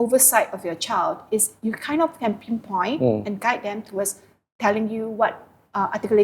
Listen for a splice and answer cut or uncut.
uncut